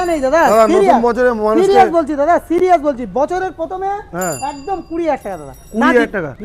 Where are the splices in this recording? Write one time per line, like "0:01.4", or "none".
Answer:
none